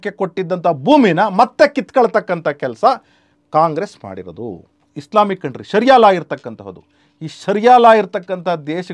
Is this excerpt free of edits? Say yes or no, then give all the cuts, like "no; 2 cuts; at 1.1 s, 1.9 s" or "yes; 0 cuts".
no; 1 cut; at 4.8 s